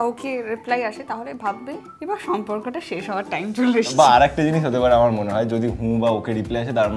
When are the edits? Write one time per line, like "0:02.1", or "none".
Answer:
none